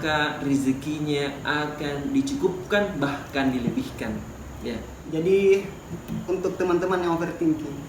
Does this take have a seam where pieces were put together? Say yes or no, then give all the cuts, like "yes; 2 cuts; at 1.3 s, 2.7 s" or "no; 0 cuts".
yes; 1 cut; at 4.9 s